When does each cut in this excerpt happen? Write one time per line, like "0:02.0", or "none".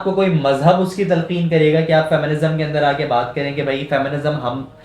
none